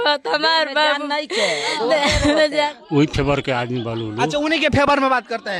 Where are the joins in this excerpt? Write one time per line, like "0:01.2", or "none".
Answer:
none